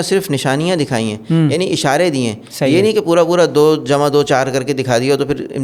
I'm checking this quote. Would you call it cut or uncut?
uncut